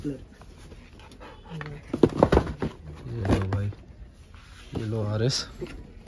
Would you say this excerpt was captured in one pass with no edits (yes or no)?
yes